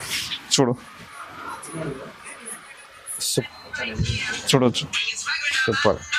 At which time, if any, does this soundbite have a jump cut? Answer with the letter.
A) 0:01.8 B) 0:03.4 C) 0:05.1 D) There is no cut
B